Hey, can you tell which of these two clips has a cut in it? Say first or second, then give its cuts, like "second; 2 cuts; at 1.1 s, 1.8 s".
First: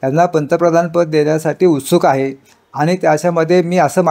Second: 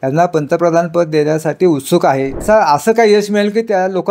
second; 1 cut; at 2.4 s